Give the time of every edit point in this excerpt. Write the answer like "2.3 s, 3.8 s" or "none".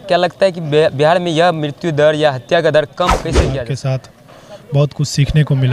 3.5 s